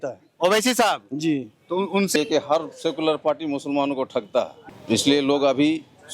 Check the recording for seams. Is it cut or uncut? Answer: cut